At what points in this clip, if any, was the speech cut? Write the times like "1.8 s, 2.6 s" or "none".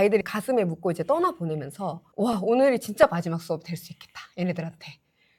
none